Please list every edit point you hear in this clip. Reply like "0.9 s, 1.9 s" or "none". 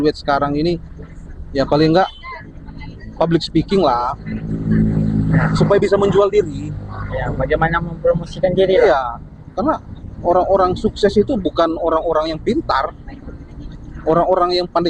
none